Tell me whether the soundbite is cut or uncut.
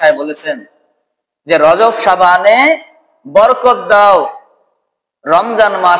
uncut